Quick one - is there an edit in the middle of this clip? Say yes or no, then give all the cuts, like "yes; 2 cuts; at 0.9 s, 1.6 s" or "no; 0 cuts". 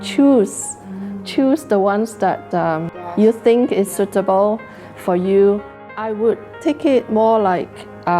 yes; 2 cuts; at 3.0 s, 5.9 s